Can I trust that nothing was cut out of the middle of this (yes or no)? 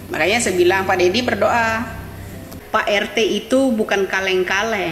no